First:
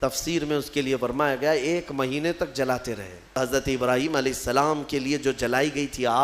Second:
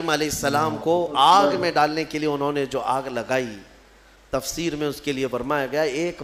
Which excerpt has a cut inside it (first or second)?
first